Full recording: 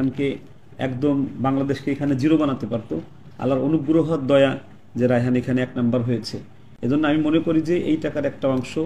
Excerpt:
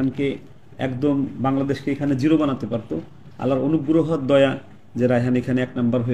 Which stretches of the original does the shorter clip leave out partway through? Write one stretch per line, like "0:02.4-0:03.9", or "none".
none